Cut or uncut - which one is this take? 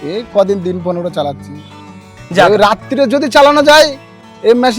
cut